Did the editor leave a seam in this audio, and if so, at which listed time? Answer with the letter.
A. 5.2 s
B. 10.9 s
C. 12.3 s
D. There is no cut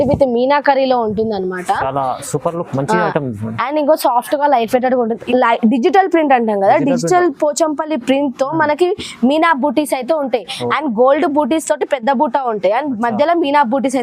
A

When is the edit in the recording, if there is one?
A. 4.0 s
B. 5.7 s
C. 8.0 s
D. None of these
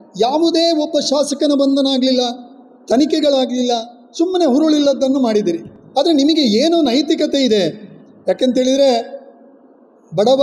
D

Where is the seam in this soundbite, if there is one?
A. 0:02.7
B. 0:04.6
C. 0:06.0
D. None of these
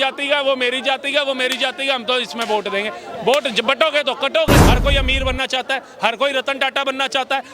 B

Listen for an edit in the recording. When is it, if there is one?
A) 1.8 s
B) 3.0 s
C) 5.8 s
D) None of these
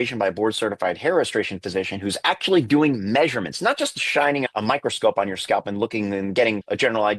D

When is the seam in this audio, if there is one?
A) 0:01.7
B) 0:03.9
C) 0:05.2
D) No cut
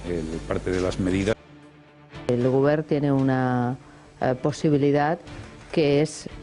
A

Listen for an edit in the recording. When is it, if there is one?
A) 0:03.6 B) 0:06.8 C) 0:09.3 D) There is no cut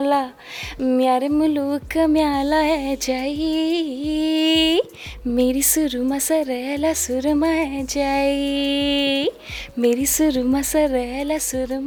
D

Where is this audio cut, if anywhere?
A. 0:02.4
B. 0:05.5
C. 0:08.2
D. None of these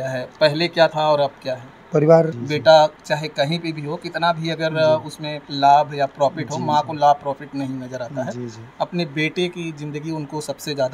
A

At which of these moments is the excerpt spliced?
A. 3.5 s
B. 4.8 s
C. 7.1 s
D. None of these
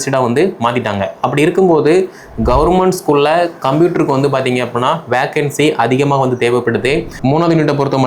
C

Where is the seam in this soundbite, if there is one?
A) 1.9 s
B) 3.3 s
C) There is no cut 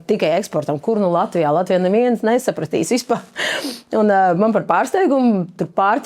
C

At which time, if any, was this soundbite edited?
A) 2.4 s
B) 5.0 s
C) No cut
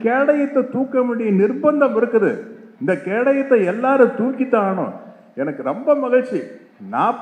C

